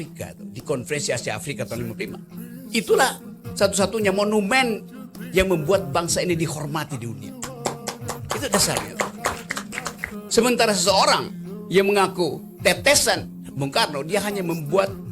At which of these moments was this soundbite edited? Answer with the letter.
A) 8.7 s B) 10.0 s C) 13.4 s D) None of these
B